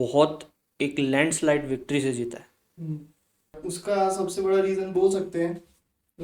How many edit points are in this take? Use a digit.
1